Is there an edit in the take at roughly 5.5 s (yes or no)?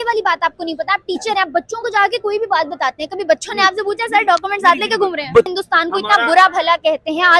yes